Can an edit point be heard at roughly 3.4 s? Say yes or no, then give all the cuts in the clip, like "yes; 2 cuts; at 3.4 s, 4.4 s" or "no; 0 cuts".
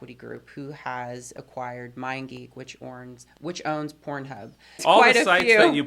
no; 1 cut; at 4.8 s